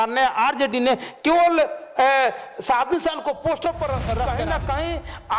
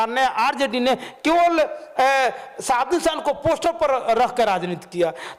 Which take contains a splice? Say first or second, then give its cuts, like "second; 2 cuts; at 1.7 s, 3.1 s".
first; 1 cut; at 4.3 s